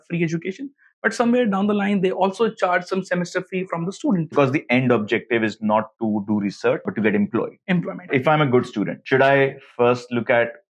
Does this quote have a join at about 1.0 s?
no; 3 cuts; at 4.3 s, 6.9 s, 8.1 s

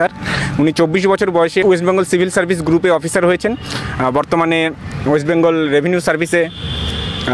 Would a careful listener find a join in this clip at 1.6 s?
yes; 1 cut; at 1.6 s

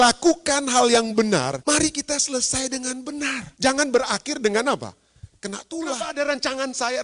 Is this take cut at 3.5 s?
yes; 3 cuts; at 1.6 s, 3.5 s, 5.9 s

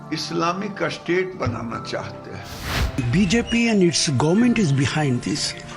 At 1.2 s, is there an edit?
no; 1 cut; at 2.9 s

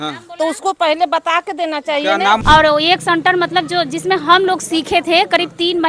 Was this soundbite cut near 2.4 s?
yes; 1 cut; at 2.4 s

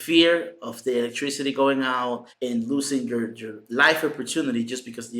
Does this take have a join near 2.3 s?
yes; 1 cut; at 2.3 s

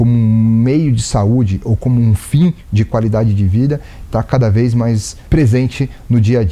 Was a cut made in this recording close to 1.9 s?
no; 1 cut; at 5.1 s

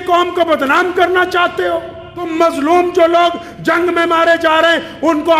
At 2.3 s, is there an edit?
yes; 1 cut; at 2.3 s

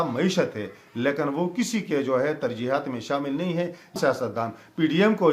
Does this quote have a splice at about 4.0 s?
yes; 1 cut; at 4.0 s

